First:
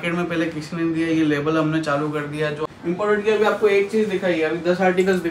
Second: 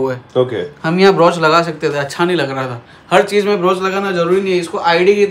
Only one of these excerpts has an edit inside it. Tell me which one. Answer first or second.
first